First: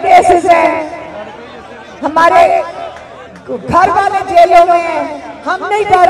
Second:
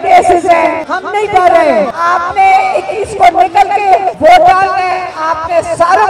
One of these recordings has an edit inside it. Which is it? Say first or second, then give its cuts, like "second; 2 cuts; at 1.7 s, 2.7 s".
second; 3 cuts; at 0.9 s, 1.9 s, 4.1 s